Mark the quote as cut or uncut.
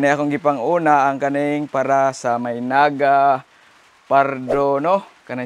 uncut